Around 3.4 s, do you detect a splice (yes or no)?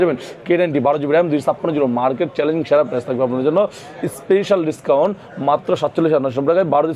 no